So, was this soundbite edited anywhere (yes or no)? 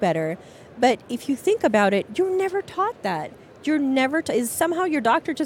no